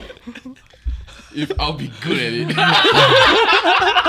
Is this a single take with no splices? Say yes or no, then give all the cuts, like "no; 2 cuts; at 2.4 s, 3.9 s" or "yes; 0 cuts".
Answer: yes; 0 cuts